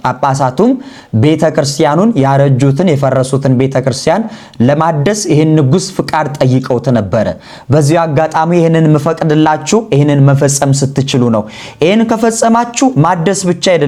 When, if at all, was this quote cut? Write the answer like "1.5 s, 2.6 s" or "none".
none